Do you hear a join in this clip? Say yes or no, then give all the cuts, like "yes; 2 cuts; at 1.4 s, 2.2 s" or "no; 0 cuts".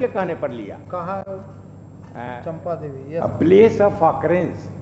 no; 0 cuts